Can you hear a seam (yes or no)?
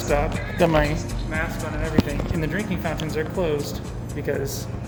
no